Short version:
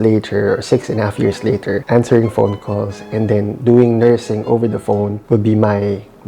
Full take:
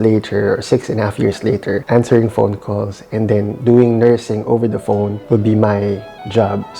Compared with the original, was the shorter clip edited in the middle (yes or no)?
no